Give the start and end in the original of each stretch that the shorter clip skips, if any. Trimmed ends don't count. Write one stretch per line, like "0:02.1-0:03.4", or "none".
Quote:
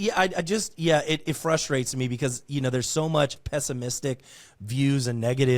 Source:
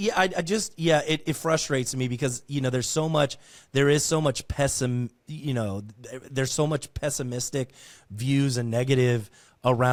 0:03.4-0:06.9